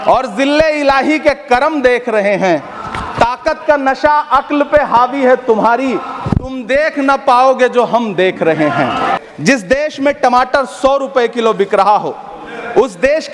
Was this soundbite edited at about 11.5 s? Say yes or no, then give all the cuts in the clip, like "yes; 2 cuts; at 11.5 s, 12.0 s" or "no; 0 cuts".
no; 1 cut; at 9.2 s